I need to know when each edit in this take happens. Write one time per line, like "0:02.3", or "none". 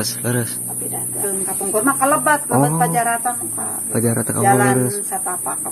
0:01.2